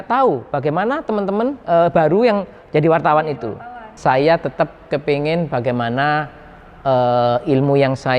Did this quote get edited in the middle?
yes; 1 cut; at 3.7 s

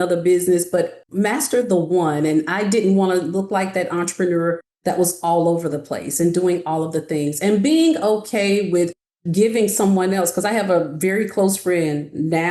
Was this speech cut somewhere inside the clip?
yes; 1 cut; at 1.0 s

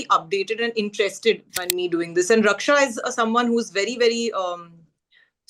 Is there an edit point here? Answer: yes; 1 cut; at 1.5 s

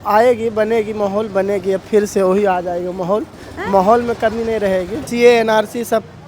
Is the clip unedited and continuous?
no; 1 cut; at 5.0 s

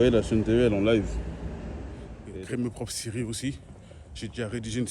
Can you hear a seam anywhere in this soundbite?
yes; 1 cut; at 2.1 s

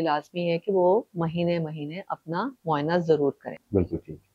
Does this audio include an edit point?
no; 0 cuts

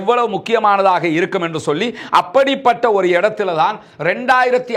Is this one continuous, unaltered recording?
yes; 0 cuts

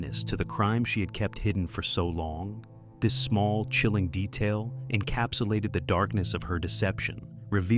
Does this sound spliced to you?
no; 0 cuts

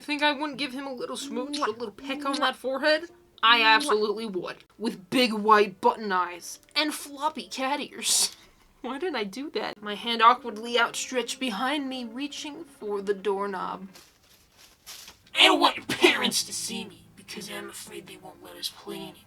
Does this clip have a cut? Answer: yes; 3 cuts; at 4.6 s, 9.8 s, 15.2 s

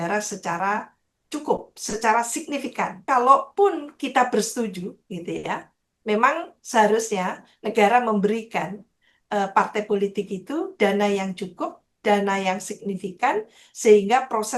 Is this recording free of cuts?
no; 1 cut; at 3.0 s

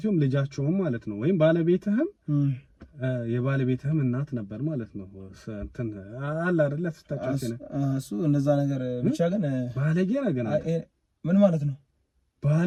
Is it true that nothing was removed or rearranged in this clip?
yes; 0 cuts

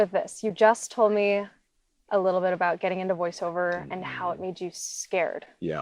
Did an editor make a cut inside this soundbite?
no; 0 cuts

